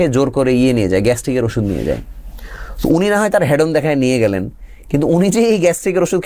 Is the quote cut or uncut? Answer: uncut